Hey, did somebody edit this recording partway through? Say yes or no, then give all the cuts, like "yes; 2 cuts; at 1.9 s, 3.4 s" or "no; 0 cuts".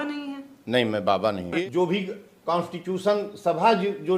yes; 1 cut; at 1.6 s